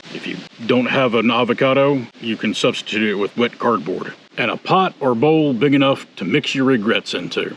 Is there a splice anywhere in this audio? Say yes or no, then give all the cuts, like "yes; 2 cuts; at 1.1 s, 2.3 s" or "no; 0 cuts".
no; 0 cuts